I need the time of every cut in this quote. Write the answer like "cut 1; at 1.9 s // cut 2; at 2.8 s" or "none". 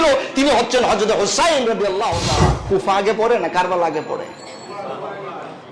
cut 1; at 2.6 s